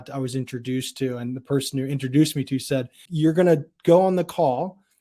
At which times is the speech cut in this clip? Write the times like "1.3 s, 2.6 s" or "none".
3.0 s